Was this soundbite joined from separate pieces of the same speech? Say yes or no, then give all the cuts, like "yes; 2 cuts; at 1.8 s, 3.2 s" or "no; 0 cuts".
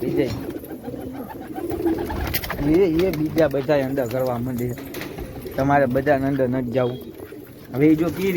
no; 0 cuts